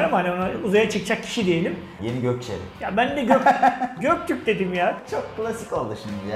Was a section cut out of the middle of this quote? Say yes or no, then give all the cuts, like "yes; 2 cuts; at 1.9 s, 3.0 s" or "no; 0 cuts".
yes; 2 cuts; at 2.0 s, 5.0 s